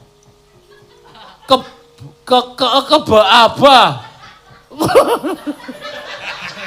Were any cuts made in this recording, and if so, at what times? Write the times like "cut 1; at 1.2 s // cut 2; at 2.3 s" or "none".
cut 1; at 5.4 s